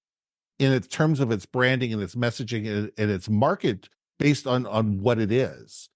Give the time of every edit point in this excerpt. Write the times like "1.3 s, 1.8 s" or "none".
none